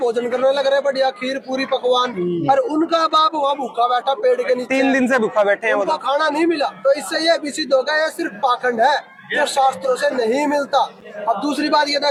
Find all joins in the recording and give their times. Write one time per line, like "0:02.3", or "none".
none